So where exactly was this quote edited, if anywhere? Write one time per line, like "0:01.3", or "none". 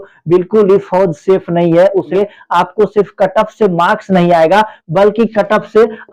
0:02.1

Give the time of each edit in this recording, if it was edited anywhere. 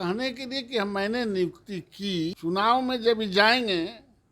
0:02.3

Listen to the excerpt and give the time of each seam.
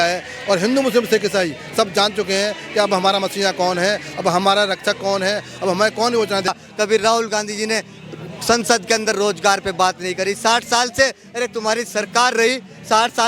0:06.5

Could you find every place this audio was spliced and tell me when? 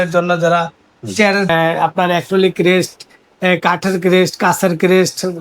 0:01.5

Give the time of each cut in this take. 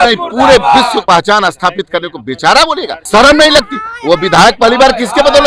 0:01.0
0:02.9

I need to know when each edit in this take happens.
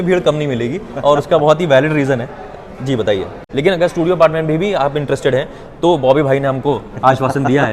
0:03.4

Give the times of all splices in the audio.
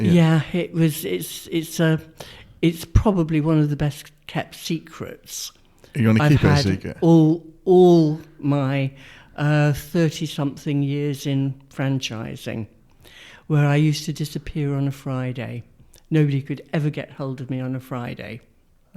none

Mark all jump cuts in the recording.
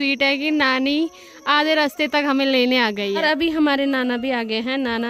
0:03.2

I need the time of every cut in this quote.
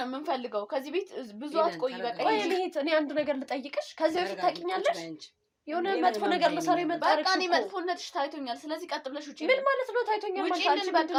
none

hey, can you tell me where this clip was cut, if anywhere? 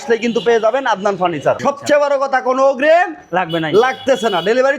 0:01.6

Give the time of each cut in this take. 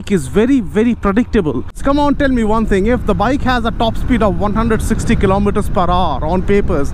0:01.9

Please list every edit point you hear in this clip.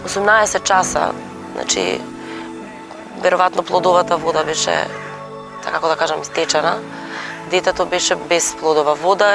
0:08.2

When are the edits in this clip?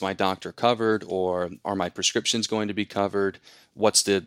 0:01.6

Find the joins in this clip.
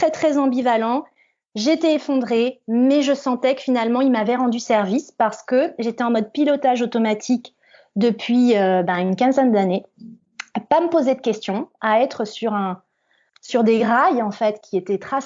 none

